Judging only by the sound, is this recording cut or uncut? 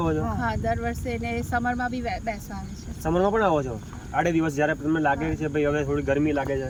uncut